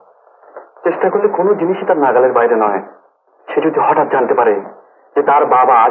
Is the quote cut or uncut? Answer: uncut